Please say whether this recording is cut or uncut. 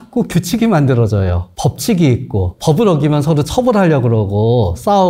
uncut